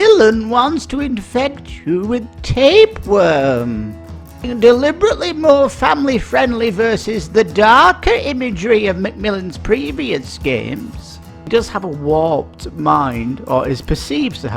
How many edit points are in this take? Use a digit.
2